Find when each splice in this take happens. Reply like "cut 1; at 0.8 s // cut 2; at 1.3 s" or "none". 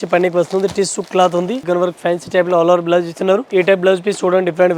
cut 1; at 1.6 s // cut 2; at 3.5 s